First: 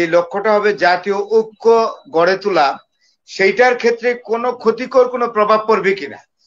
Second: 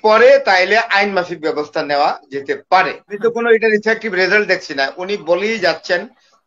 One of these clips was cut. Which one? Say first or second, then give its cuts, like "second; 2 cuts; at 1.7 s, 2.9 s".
second; 1 cut; at 3.2 s